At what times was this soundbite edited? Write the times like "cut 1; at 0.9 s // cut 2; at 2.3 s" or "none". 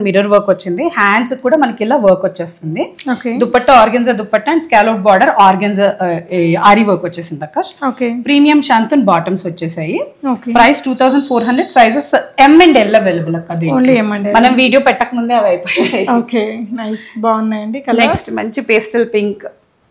none